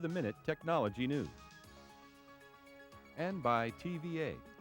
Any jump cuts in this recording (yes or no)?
yes